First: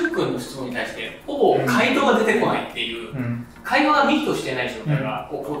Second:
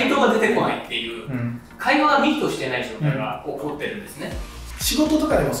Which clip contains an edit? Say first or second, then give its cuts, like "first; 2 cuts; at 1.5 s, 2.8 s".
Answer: second; 1 cut; at 4.7 s